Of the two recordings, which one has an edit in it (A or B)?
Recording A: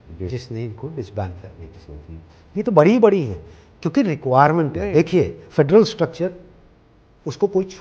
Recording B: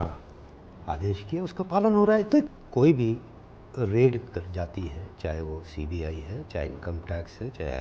B